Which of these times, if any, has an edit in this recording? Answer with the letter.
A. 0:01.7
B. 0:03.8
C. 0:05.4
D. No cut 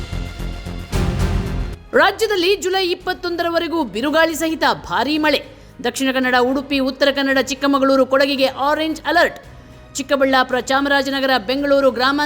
D